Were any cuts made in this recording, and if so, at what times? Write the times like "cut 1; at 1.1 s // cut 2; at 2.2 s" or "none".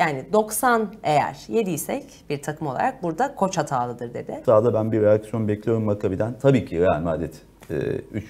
cut 1; at 4.4 s